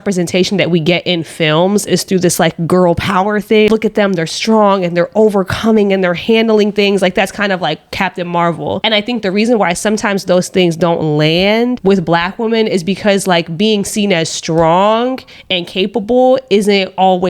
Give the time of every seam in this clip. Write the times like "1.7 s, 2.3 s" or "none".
3.7 s, 8.8 s